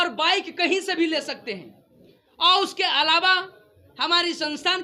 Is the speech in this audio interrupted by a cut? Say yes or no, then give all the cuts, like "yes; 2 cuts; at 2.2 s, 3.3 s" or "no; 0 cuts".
no; 0 cuts